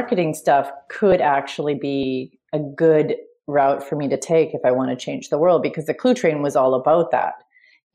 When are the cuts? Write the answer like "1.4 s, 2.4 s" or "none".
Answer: none